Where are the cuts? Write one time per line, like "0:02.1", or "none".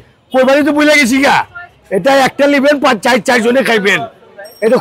none